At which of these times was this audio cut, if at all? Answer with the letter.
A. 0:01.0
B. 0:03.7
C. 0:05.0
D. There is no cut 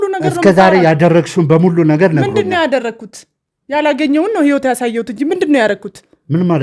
D